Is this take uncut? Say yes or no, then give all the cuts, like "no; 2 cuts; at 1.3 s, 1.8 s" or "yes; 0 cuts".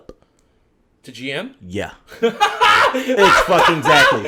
yes; 0 cuts